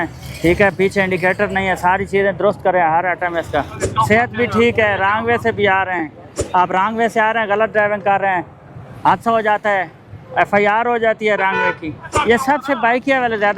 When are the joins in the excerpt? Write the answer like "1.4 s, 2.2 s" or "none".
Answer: 3.8 s, 6.4 s, 12.1 s

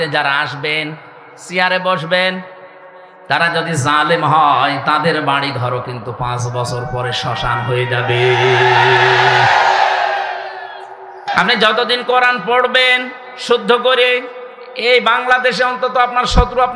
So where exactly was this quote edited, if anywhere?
11.3 s

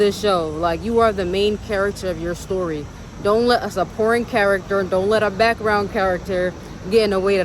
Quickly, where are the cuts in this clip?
none

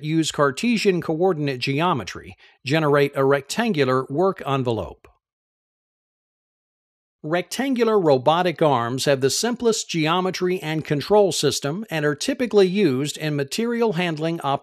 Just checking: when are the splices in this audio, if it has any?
none

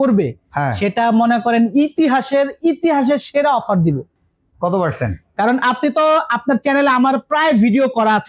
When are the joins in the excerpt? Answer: none

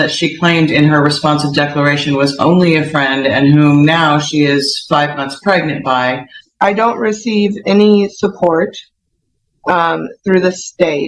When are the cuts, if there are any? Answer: 6.4 s

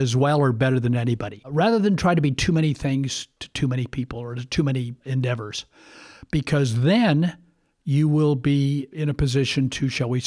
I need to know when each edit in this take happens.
1.5 s, 5.0 s

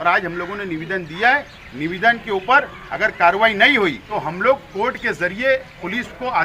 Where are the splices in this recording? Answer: 4.1 s

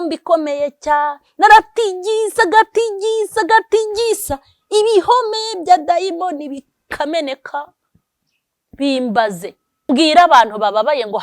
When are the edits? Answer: 9.7 s

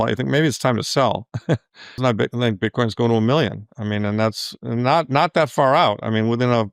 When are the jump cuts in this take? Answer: 2.0 s

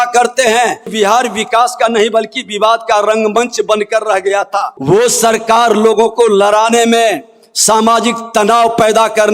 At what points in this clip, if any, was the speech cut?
0.9 s, 4.7 s

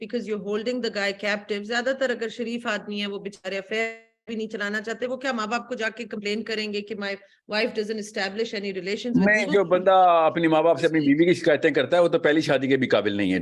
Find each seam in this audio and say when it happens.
none

